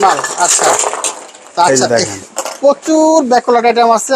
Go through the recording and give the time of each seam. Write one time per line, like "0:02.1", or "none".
none